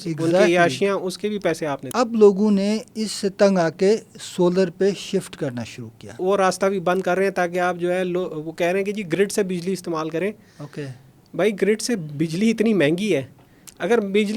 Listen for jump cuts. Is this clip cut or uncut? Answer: cut